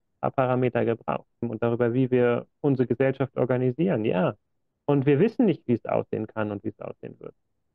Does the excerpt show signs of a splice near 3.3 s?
no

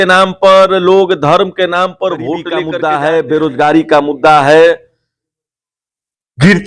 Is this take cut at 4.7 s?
no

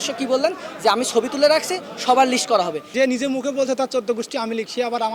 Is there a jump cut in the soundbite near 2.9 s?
yes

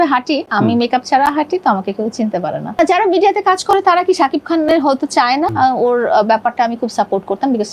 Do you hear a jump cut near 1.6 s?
no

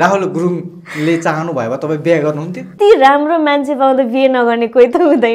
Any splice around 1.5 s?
no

